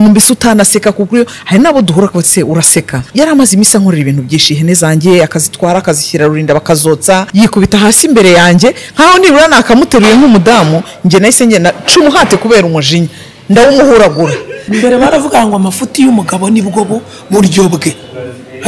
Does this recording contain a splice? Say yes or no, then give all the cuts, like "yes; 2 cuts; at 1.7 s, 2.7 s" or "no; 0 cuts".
yes; 3 cuts; at 3.1 s, 7.3 s, 14.6 s